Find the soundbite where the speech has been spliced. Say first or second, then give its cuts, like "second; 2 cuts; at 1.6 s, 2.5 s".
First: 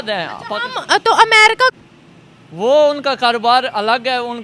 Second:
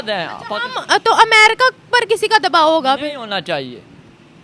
first; 1 cut; at 1.8 s